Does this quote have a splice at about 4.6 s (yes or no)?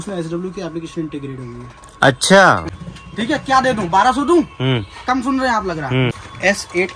no